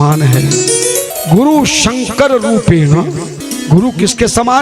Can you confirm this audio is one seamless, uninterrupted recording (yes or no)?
no